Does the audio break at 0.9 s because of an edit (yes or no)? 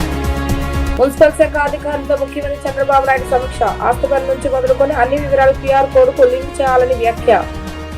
yes